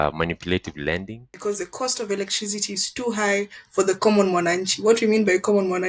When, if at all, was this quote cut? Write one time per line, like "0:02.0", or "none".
0:01.2